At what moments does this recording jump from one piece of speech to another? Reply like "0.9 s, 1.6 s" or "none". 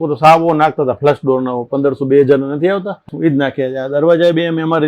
3.1 s